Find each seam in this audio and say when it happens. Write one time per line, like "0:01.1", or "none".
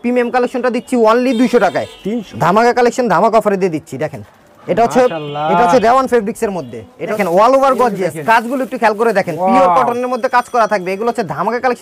0:02.2
0:07.2